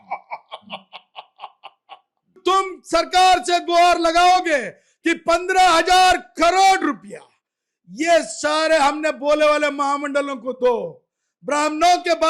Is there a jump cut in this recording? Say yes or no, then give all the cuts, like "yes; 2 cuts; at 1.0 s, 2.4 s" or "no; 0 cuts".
yes; 1 cut; at 2.4 s